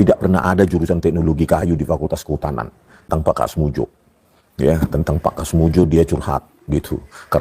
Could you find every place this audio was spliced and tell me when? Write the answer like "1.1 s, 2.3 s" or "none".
3.1 s